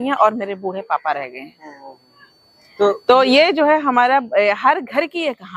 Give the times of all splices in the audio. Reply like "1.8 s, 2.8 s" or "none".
none